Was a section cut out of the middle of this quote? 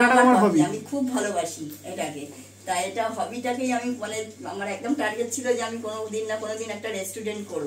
no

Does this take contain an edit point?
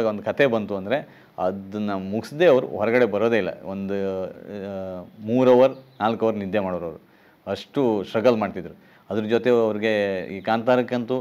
no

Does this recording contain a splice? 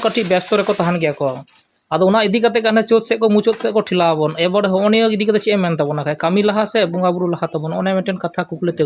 no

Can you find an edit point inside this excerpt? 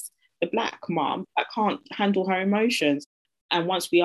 yes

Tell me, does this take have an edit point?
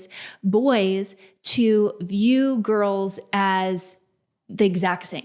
no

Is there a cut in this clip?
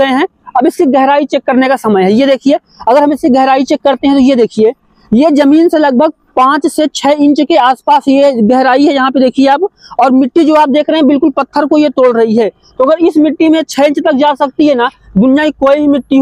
no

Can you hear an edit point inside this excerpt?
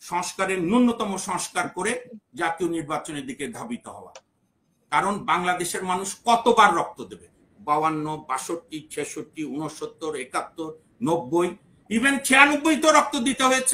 no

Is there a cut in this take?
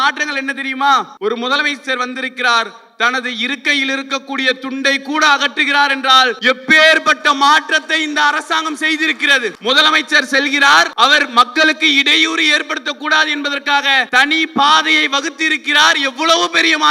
yes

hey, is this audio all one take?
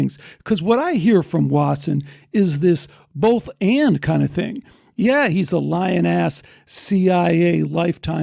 yes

